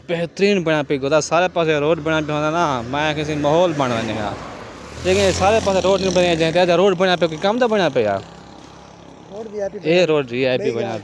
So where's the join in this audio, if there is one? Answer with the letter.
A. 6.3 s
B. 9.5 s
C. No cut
C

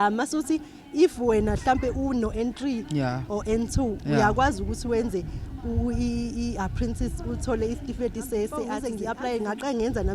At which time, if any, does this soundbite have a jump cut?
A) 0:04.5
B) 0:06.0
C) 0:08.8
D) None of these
C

